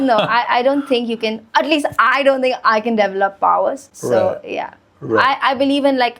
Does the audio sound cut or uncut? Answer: uncut